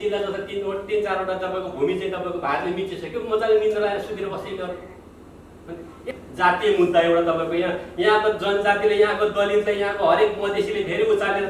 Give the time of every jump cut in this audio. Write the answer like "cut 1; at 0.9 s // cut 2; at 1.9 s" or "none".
cut 1; at 6.1 s